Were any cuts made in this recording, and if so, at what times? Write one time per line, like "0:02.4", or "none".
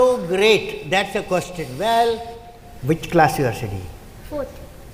none